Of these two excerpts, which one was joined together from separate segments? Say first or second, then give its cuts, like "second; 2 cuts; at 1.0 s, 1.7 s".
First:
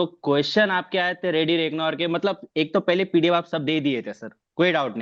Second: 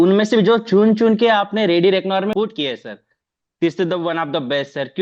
second; 1 cut; at 2.3 s